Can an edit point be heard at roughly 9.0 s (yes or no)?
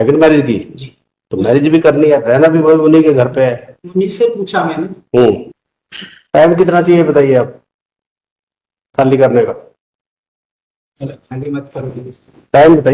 no